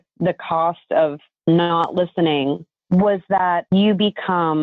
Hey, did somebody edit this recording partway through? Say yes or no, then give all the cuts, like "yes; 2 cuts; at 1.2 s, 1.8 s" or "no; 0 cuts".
yes; 3 cuts; at 1.3 s, 2.7 s, 3.6 s